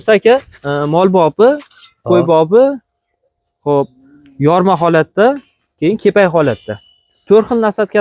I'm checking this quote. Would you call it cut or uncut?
uncut